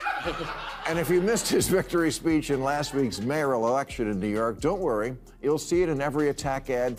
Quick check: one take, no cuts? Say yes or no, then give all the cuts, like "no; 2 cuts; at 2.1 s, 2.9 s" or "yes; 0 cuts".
yes; 0 cuts